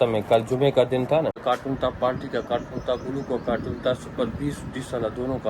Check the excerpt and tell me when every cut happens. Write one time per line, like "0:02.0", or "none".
0:01.4